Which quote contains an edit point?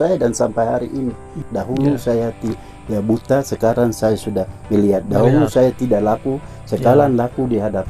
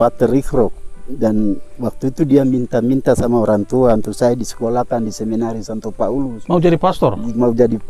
first; 1 cut; at 1.4 s

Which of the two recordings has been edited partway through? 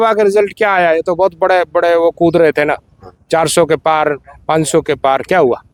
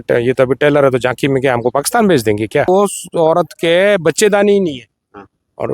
second; 1 cut; at 2.7 s

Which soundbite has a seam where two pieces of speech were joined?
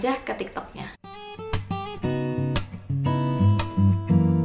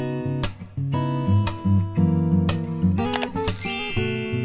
first; 1 cut; at 0.9 s

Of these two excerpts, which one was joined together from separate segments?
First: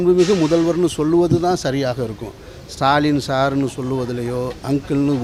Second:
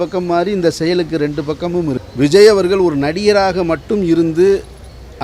second; 1 cut; at 2.0 s

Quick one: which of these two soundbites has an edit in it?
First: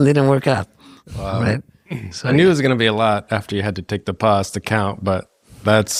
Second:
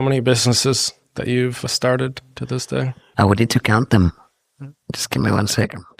second; 3 cuts; at 1.6 s, 3.0 s, 4.7 s

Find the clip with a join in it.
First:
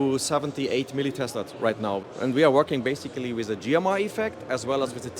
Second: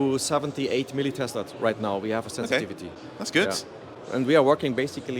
first; 1 cut; at 2.0 s

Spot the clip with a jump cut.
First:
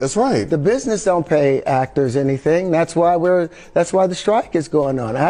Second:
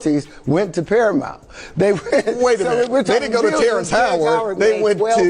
second; 1 cut; at 1.9 s

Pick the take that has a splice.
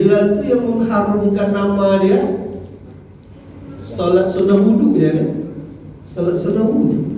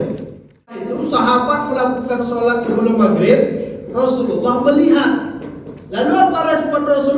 second; 1 cut; at 0.9 s

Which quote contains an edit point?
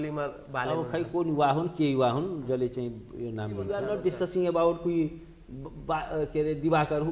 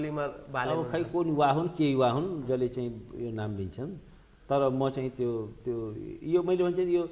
first; 1 cut; at 3.7 s

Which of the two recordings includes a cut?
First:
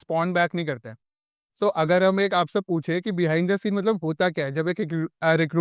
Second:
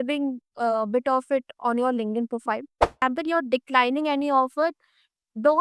second; 1 cut; at 3.0 s

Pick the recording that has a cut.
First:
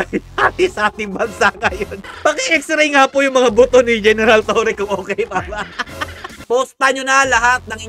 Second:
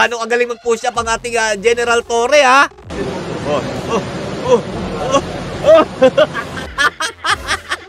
first; 2 cuts; at 2.0 s, 6.4 s

